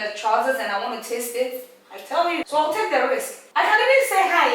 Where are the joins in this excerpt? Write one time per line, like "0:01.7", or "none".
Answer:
0:02.4
0:03.4